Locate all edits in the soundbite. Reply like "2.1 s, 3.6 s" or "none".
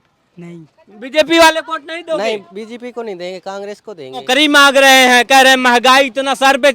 4.2 s